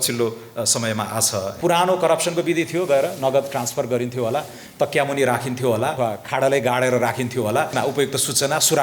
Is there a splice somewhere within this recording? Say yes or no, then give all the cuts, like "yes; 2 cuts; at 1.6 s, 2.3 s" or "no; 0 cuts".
yes; 3 cuts; at 1.5 s, 6.0 s, 7.7 s